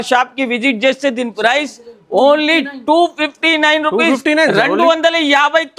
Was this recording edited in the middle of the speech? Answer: no; 0 cuts

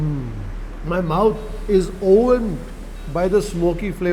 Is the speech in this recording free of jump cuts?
yes; 0 cuts

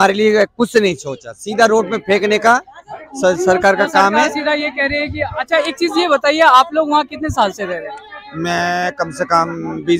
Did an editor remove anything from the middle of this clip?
no; 0 cuts

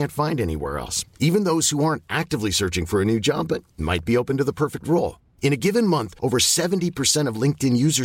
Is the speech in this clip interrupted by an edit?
no; 0 cuts

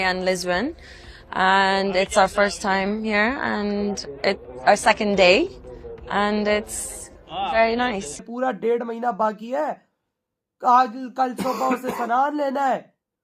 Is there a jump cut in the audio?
yes; 1 cut; at 8.2 s

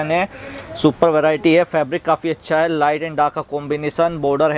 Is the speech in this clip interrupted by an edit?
no; 0 cuts

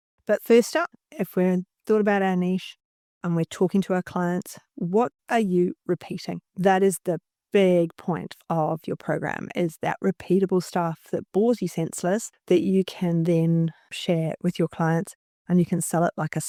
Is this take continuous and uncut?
yes; 0 cuts

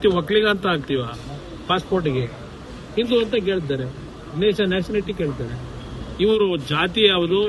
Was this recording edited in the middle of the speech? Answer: no; 0 cuts

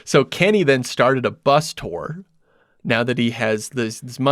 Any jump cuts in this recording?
no; 0 cuts

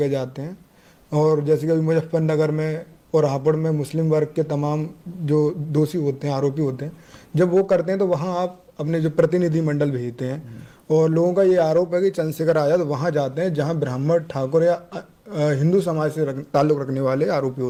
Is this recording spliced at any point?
no; 0 cuts

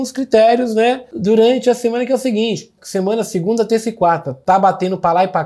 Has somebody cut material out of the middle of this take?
yes; 3 cuts; at 1.1 s, 2.7 s, 4.3 s

